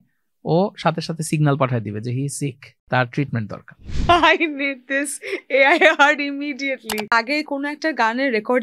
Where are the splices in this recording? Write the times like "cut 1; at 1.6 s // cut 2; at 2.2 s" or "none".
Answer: cut 1; at 2.7 s // cut 2; at 3.9 s // cut 3; at 7.1 s